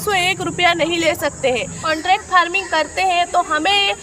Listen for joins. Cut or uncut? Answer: cut